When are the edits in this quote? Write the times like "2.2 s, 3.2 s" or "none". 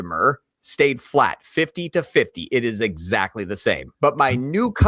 3.9 s